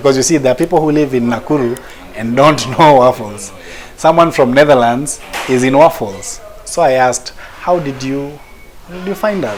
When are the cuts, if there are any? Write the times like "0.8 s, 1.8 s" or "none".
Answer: none